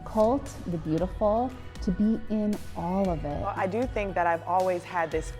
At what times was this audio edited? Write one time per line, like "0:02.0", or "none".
0:03.5